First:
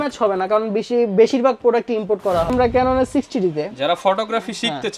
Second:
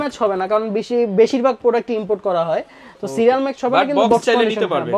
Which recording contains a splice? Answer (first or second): first